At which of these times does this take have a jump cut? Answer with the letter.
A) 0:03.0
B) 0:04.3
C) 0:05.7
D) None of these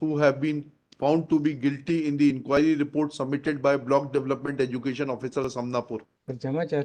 C